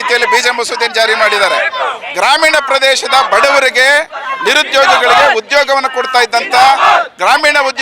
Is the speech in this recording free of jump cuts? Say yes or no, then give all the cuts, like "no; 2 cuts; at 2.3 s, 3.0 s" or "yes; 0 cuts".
yes; 0 cuts